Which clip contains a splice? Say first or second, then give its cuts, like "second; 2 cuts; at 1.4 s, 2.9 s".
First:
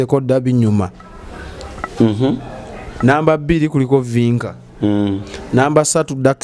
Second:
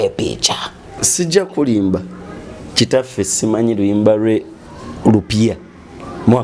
second; 1 cut; at 1.0 s